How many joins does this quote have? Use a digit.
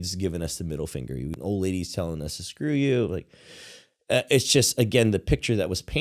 1